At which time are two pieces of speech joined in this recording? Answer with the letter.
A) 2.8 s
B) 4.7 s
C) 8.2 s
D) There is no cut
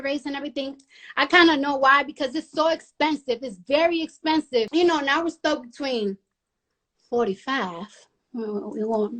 B